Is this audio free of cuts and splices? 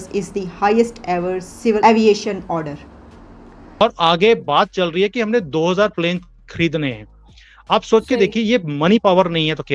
no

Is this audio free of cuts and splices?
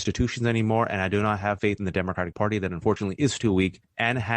yes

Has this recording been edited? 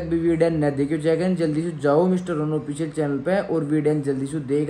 no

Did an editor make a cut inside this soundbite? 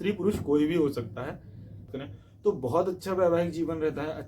yes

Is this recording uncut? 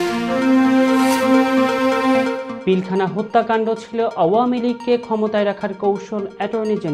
no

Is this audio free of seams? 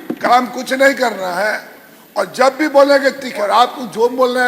no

